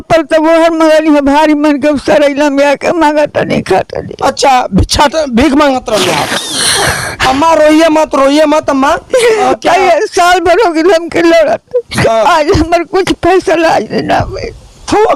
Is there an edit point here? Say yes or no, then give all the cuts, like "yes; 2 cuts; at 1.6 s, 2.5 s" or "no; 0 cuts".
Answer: no; 0 cuts